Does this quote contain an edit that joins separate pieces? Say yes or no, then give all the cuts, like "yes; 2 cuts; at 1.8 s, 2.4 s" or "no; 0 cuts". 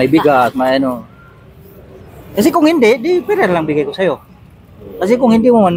no; 0 cuts